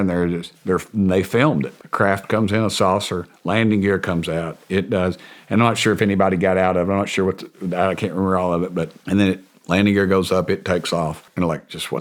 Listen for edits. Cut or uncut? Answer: uncut